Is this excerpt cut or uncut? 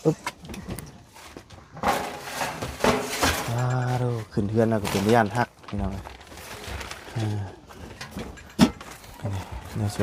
uncut